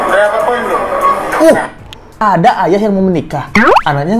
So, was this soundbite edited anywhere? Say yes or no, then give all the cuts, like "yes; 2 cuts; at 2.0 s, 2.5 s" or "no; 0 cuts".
yes; 1 cut; at 2.1 s